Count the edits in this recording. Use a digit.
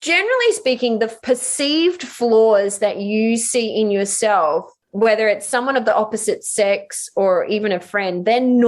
2